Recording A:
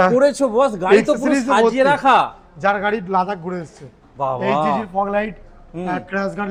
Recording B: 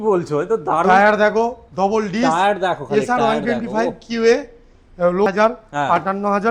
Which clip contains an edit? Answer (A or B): B